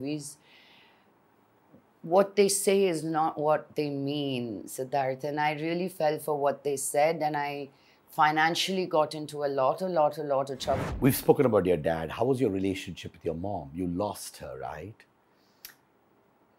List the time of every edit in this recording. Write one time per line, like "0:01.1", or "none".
0:10.8